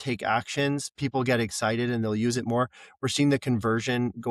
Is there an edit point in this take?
no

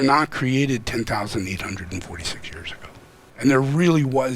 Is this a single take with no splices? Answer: no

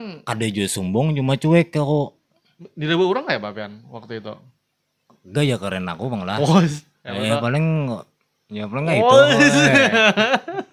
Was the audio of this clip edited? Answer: no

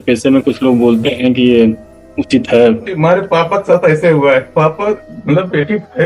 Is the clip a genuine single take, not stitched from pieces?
no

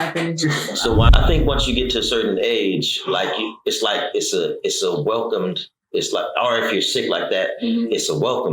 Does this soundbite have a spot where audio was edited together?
yes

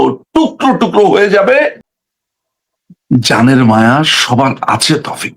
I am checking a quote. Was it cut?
yes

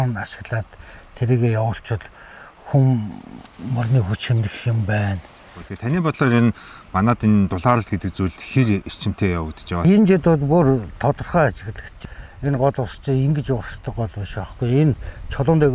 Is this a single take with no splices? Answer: no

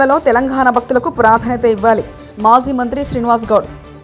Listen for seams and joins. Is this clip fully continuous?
yes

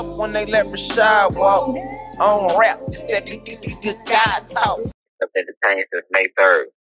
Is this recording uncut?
no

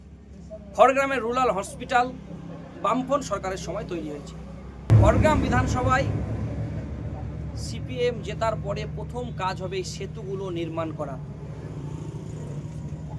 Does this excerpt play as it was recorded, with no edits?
no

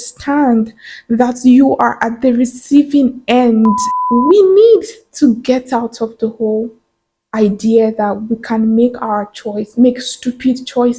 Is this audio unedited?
no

